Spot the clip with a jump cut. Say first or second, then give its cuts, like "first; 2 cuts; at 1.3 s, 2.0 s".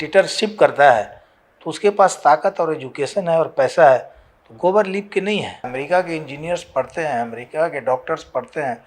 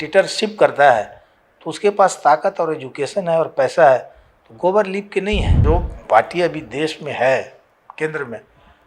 second; 1 cut; at 5.6 s